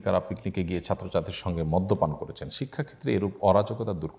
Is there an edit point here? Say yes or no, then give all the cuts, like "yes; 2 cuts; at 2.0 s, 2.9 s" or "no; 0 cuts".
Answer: no; 0 cuts